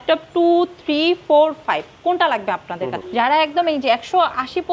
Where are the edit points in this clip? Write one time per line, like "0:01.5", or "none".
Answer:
0:03.0

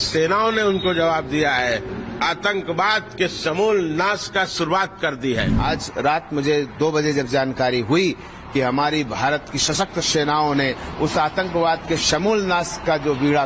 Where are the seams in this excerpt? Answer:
0:01.9
0:05.5

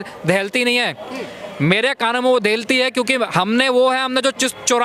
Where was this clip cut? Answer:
none

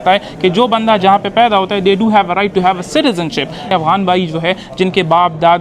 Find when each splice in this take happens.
0:03.7

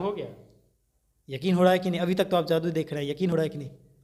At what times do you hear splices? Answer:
none

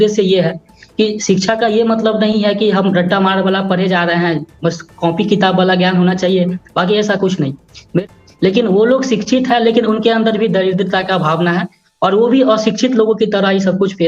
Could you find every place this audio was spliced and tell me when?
0:08.0

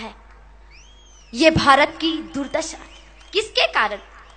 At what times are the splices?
0:01.3

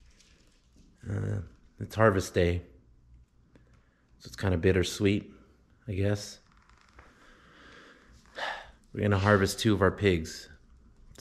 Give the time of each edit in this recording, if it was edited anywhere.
0:08.7

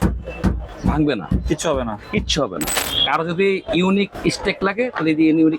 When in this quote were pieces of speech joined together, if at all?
0:02.9

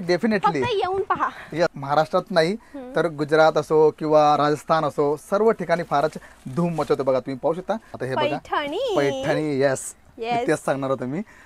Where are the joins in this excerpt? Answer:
0:01.8
0:07.9

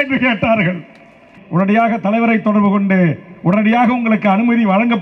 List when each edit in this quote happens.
0:01.3

